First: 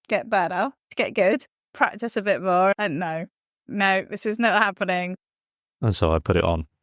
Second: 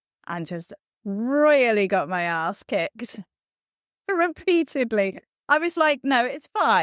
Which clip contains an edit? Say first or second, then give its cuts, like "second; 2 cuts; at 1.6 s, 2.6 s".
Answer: first; 4 cuts; at 0.9 s, 1.7 s, 3.6 s, 5.2 s